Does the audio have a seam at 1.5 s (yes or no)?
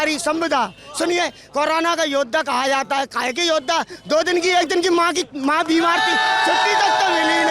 no